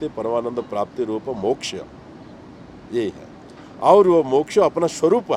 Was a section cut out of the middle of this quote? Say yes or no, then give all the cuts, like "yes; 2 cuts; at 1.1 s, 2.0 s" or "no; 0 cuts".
no; 0 cuts